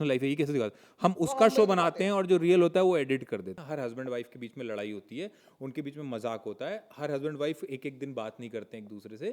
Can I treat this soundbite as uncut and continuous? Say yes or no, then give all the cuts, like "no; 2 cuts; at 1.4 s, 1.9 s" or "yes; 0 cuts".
no; 1 cut; at 3.6 s